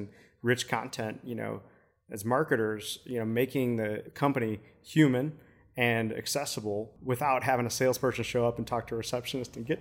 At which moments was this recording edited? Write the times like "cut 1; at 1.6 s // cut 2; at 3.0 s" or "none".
cut 1; at 4.1 s // cut 2; at 7.0 s